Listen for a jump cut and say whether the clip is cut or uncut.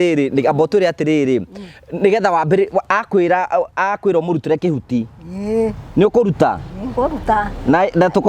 uncut